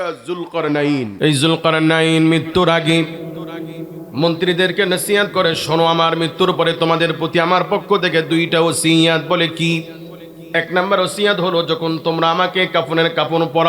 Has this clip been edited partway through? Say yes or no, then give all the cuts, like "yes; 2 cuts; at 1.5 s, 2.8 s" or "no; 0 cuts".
yes; 1 cut; at 1.1 s